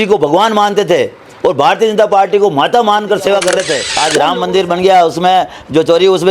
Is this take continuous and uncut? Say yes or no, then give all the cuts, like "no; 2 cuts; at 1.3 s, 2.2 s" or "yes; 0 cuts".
no; 1 cut; at 3.8 s